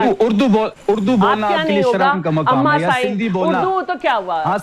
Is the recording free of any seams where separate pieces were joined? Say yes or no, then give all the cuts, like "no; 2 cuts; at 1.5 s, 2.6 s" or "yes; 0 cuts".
no; 1 cut; at 1.0 s